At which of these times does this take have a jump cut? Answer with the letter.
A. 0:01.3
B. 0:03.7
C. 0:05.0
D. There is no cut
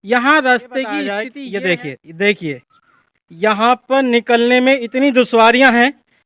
A